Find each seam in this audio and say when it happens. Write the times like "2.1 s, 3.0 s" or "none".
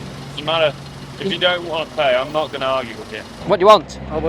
3.3 s